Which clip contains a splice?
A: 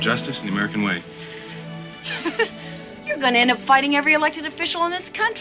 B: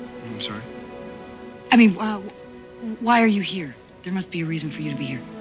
A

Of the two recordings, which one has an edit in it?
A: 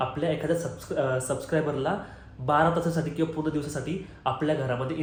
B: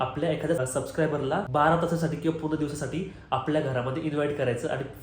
B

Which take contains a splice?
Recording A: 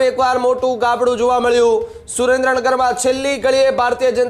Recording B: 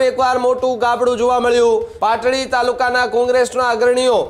B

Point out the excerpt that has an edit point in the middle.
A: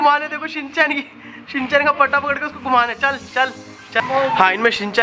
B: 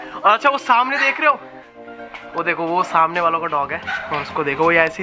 A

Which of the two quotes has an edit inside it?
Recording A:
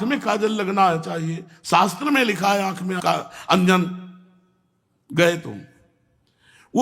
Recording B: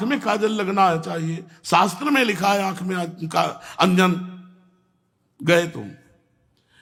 A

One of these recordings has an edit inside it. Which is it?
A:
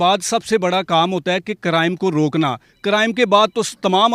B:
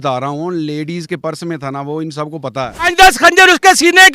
B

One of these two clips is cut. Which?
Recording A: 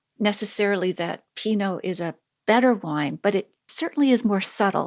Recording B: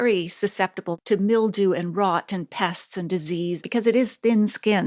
B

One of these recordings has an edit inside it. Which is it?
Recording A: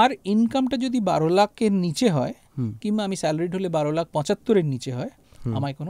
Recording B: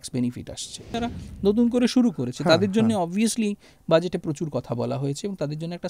B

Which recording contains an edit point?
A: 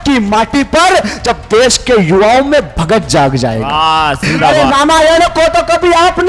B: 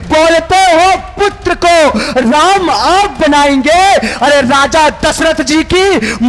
A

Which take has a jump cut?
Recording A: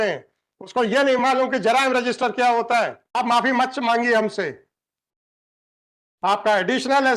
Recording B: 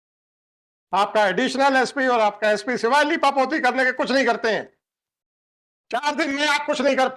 A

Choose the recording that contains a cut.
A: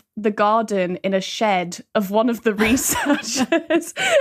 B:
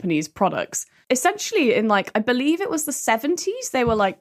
B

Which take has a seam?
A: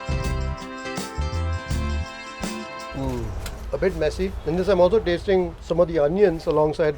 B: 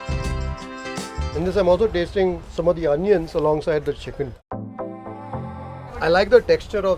B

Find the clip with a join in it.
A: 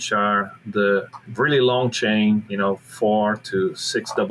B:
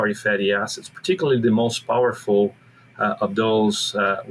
A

